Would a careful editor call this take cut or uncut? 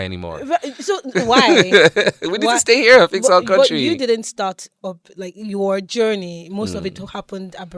uncut